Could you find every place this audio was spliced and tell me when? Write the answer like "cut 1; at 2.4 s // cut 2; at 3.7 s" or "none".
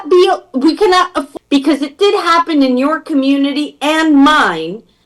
cut 1; at 1.2 s